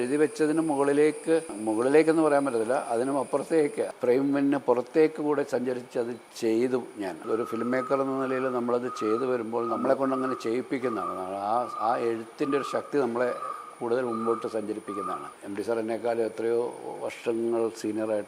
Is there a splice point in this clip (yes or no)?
yes